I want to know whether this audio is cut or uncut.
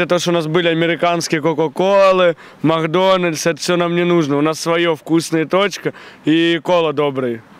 uncut